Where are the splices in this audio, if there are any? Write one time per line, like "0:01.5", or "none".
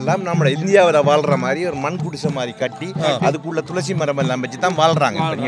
none